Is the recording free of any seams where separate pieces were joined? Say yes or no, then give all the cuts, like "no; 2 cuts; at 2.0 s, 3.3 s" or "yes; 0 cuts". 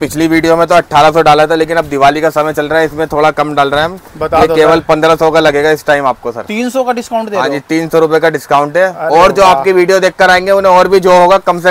yes; 0 cuts